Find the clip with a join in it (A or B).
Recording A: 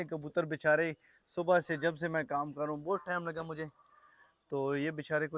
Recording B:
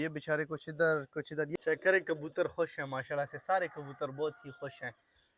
B